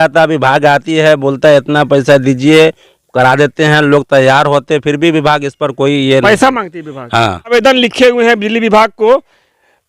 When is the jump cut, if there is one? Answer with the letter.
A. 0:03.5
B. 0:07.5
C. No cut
B